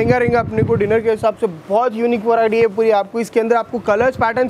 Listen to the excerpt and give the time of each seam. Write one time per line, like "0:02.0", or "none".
none